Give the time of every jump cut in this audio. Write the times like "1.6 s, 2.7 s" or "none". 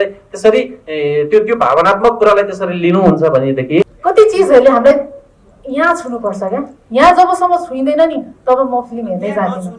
3.9 s